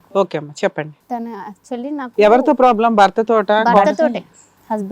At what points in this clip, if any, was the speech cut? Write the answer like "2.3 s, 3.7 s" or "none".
4.0 s